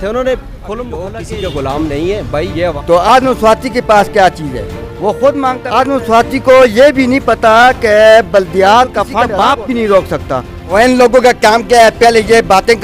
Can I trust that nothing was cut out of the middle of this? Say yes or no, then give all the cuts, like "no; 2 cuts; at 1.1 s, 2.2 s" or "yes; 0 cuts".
no; 5 cuts; at 1.1 s, 2.8 s, 5.6 s, 9.2 s, 10.6 s